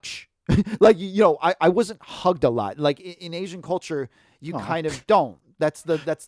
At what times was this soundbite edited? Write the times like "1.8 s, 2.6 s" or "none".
none

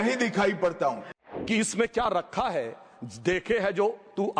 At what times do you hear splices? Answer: 1.2 s

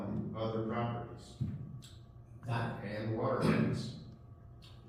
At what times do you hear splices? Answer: none

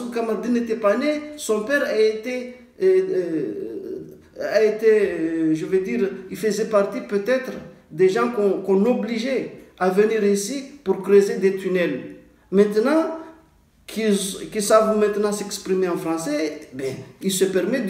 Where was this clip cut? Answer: none

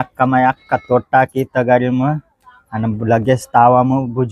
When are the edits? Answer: none

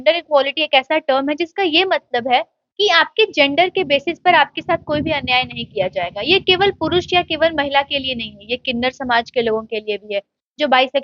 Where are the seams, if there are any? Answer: none

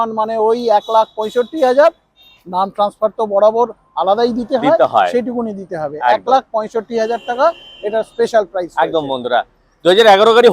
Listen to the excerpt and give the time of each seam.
none

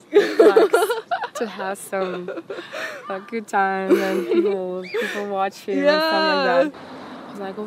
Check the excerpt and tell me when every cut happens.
6.8 s

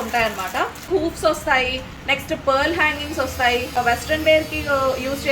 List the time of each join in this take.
0.9 s, 3.8 s

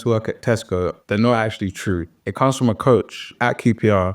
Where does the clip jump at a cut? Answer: 1.0 s

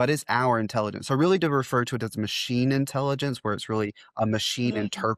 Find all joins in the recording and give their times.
none

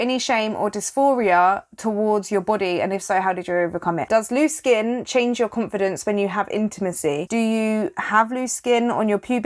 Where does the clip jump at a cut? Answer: 4.0 s, 7.2 s

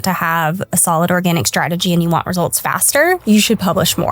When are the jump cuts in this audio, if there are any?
3.2 s

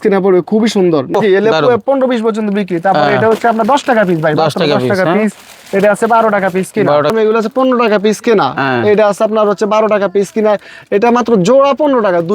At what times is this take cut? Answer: 1.2 s, 7.1 s

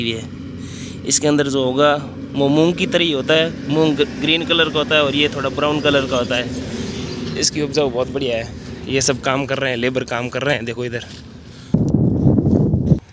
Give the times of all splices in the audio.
none

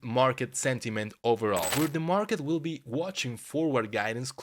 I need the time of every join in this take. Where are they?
1.7 s

